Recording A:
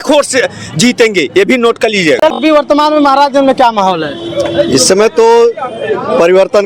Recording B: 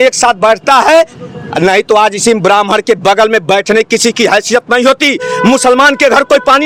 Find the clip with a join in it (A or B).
A